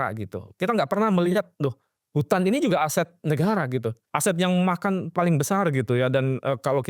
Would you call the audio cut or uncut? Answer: cut